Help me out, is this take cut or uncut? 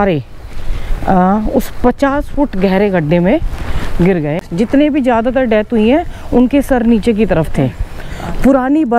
cut